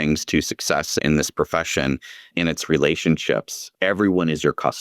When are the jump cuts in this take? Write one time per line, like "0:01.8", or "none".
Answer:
0:01.0
0:02.3